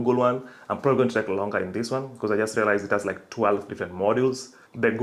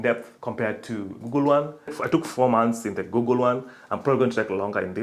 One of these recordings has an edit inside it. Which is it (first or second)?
second